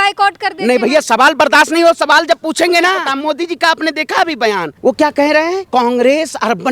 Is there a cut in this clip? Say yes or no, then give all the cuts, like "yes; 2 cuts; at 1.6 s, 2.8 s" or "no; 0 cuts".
yes; 3 cuts; at 3.1 s, 4.7 s, 5.6 s